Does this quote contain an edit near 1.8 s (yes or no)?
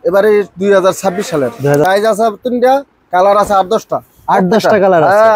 yes